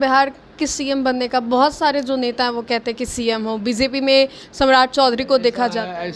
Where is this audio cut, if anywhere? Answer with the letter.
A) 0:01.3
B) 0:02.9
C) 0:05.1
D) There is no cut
D